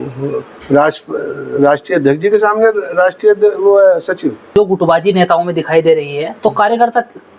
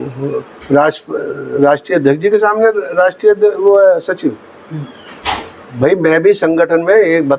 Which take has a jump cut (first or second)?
first